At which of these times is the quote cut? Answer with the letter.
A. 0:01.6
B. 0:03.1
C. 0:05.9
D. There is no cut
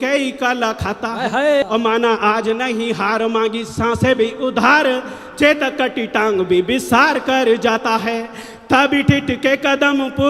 A